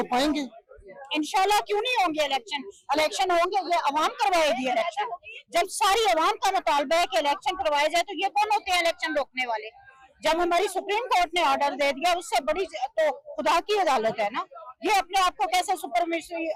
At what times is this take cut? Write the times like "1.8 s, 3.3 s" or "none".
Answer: none